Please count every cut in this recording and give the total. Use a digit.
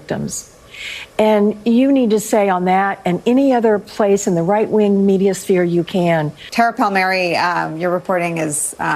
1